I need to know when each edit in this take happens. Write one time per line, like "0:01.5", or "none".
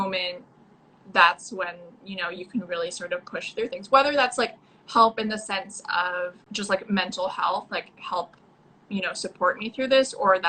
0:06.4